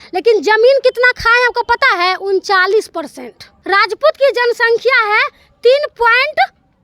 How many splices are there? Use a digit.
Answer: 1